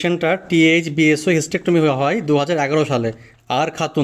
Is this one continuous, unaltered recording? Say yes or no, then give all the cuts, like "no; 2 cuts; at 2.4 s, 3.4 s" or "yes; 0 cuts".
yes; 0 cuts